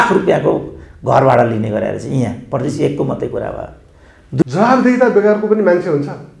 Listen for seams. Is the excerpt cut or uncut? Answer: cut